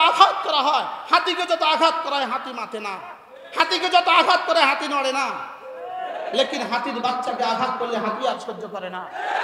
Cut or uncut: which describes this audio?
uncut